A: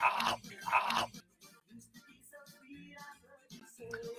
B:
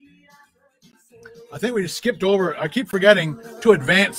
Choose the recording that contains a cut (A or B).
A